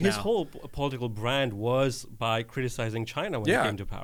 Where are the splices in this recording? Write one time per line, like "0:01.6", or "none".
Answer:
none

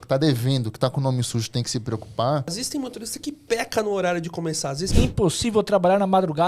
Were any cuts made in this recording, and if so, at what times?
0:02.6
0:04.8

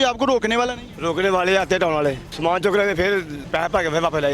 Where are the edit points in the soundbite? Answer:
0:02.3
0:03.4

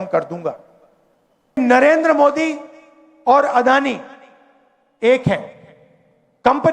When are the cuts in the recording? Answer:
0:01.6

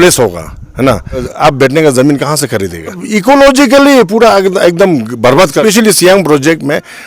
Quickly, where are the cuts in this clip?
0:01.3
0:03.1
0:05.6

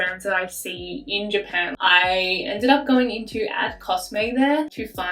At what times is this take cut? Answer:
0:01.7

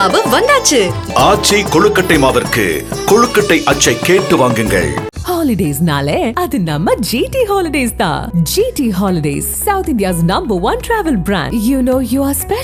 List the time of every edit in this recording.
none

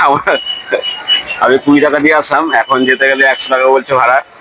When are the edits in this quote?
none

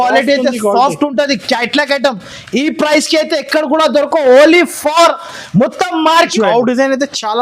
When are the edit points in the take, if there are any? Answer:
0:06.3

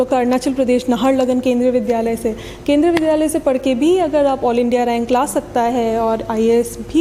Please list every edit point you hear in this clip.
none

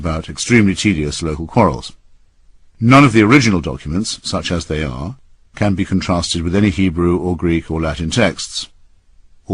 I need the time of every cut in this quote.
none

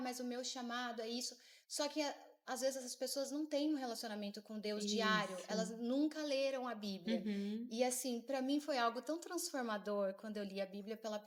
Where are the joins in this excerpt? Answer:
none

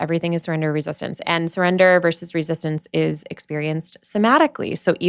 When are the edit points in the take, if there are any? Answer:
0:01.3

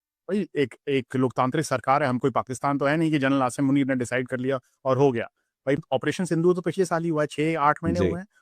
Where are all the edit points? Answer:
0:05.8

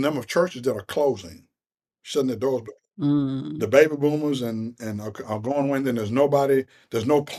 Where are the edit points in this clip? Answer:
none

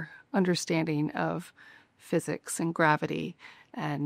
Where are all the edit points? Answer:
none

